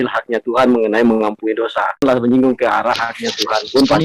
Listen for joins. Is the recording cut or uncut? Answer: cut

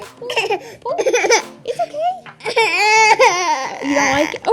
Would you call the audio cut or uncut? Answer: uncut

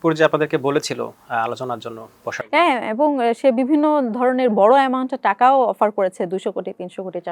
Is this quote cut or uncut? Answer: uncut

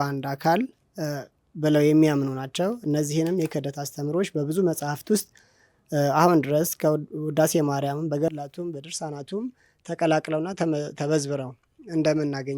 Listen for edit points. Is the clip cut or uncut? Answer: uncut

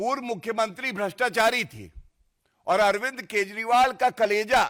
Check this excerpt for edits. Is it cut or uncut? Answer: uncut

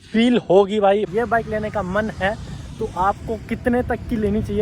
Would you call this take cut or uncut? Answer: cut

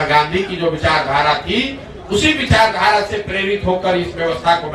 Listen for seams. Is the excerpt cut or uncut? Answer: uncut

